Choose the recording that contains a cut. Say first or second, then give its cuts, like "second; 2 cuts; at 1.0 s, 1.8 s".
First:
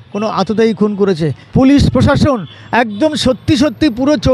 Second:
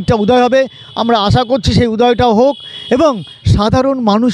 first; 1 cut; at 1.4 s